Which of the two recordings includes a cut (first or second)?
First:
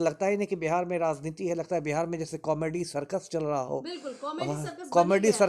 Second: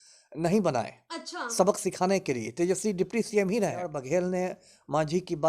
second